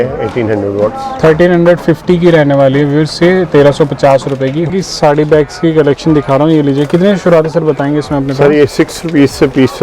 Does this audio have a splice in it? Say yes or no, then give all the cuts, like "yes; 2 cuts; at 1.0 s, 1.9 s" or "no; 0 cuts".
yes; 1 cut; at 4.7 s